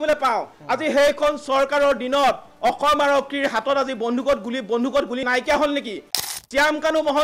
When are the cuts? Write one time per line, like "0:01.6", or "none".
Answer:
0:06.3